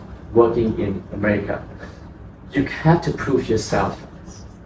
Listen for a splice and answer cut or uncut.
uncut